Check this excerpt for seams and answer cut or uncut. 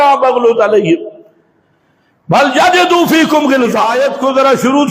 cut